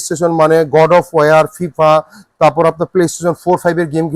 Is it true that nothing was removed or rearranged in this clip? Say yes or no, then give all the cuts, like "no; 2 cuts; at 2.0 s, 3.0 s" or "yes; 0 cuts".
yes; 0 cuts